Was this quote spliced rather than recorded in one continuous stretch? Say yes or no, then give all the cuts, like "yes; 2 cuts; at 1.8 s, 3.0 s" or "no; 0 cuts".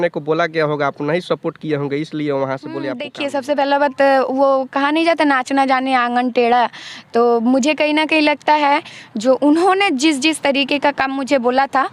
yes; 1 cut; at 3.1 s